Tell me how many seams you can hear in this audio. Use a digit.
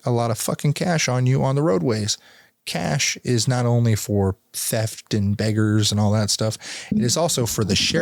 0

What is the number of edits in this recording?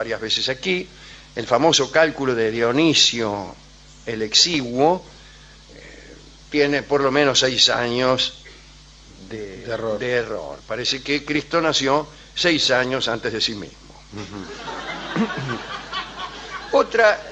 1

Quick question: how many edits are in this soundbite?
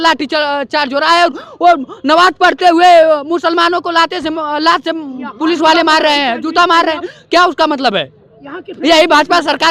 0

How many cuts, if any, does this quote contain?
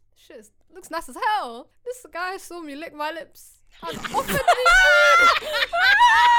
1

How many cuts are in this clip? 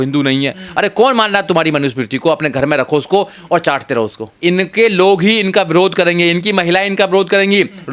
1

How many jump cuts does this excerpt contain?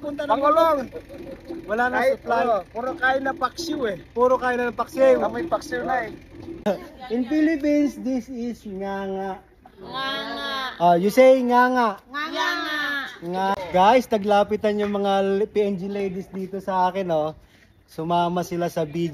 2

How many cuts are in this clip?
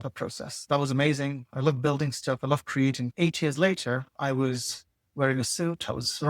1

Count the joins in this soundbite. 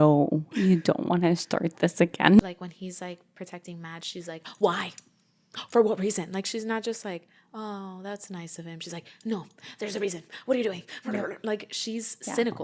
1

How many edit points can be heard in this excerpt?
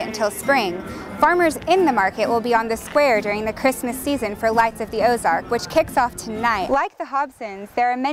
1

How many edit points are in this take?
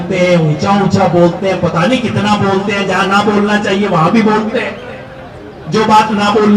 0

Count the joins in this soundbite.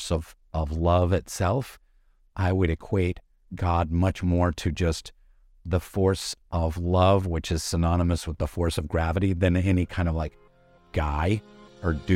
0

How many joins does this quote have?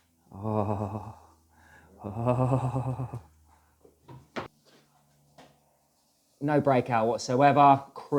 1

